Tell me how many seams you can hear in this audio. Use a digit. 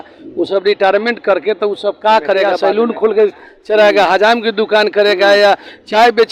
1